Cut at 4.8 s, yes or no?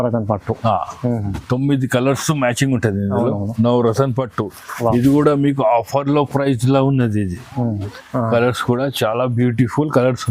no